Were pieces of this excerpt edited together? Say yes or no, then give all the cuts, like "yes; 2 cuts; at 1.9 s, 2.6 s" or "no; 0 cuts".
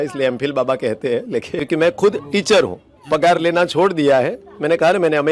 yes; 1 cut; at 1.5 s